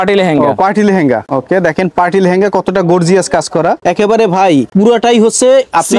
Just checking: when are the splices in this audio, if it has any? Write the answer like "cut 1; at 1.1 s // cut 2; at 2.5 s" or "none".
cut 1; at 1.3 s // cut 2; at 3.8 s // cut 3; at 4.7 s